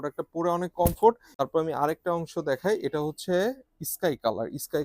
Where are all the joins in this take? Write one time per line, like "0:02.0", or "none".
0:01.4